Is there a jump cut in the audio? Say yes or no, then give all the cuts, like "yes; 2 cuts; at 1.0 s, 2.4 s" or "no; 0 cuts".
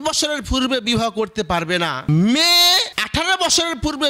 yes; 2 cuts; at 2.1 s, 3.0 s